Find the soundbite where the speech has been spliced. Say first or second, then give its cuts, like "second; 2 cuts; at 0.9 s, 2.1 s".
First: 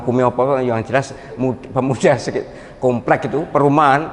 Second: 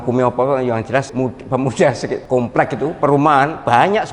second; 2 cuts; at 1.1 s, 2.2 s